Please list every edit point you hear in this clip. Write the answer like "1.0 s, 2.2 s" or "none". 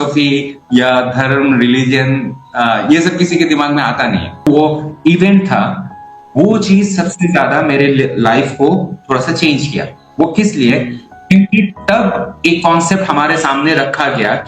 4.4 s